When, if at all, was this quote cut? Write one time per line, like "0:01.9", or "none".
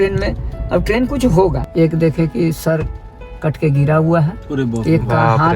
0:01.6